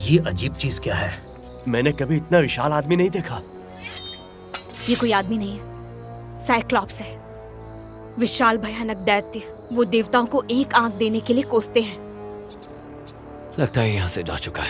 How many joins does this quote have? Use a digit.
0